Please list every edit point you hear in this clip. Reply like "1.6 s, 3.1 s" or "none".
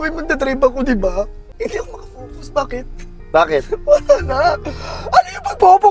1.4 s